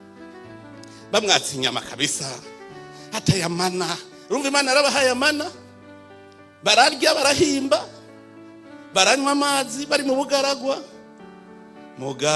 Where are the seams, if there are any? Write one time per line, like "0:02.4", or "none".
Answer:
0:00.9